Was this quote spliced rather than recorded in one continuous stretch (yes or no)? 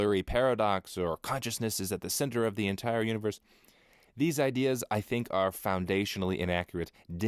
no